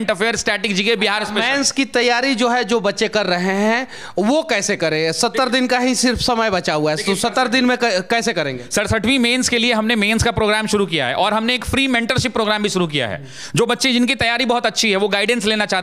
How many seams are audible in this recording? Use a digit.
0